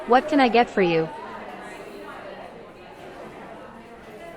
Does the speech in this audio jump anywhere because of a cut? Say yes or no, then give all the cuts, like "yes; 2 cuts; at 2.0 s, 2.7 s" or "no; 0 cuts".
yes; 1 cut; at 1.1 s